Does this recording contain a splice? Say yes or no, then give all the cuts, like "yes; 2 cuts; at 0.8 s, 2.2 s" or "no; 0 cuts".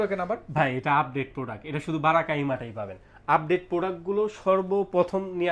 no; 0 cuts